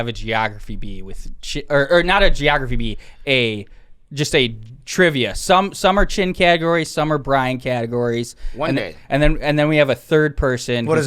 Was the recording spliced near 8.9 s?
no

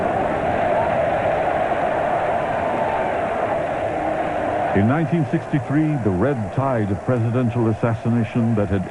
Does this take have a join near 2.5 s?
no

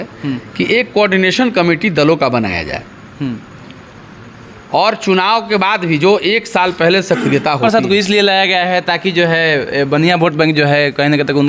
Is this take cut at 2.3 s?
no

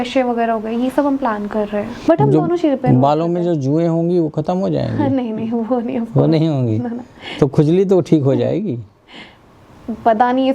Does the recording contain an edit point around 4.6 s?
no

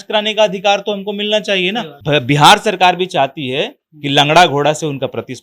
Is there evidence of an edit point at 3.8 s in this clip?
no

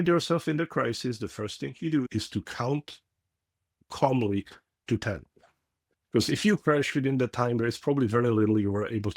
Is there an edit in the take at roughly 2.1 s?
yes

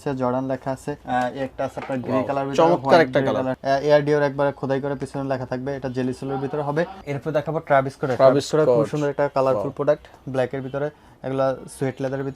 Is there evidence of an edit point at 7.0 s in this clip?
yes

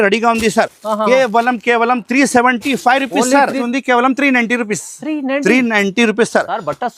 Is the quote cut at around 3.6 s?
yes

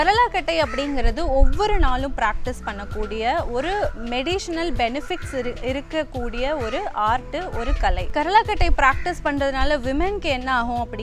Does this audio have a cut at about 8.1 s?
yes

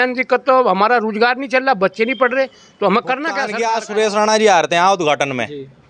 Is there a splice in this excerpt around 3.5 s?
yes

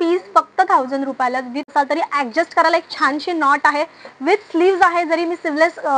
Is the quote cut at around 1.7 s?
yes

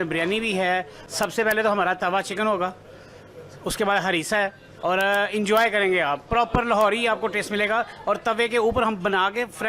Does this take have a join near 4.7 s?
yes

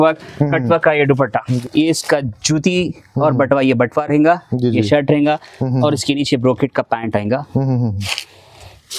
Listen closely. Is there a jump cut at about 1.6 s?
yes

